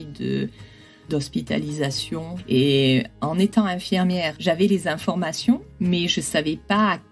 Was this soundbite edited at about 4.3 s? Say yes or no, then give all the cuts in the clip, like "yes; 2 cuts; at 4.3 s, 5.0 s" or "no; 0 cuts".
yes; 4 cuts; at 1.0 s, 2.3 s, 4.3 s, 5.7 s